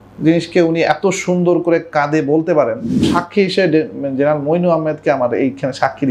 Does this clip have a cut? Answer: yes; 1 cut; at 3.1 s

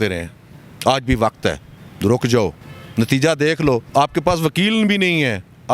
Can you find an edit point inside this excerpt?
yes; 1 cut; at 3.9 s

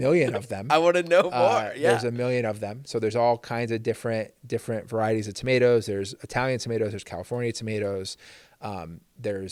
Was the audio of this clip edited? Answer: no; 0 cuts

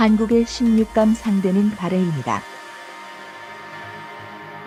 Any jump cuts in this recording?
no; 0 cuts

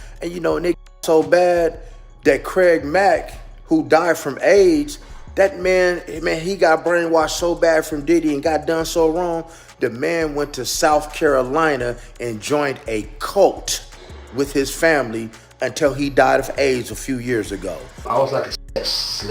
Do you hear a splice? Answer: yes; 1 cut; at 17.9 s

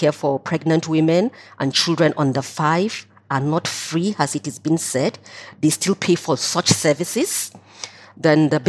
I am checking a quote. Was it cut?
no; 0 cuts

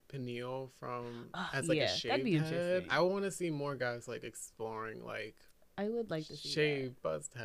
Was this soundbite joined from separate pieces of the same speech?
no; 0 cuts

